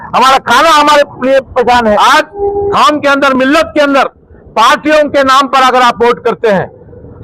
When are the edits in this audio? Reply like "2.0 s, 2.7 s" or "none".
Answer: 2.0 s